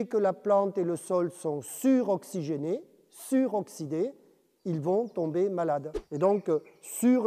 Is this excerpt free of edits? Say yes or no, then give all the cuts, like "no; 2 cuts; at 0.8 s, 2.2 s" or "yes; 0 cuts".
no; 1 cut; at 6.0 s